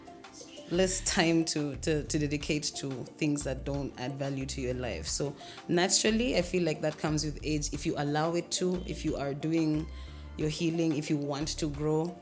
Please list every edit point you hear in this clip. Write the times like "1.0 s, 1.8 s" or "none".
none